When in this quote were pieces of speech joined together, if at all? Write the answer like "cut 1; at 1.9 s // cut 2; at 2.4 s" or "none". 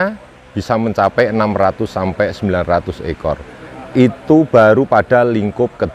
none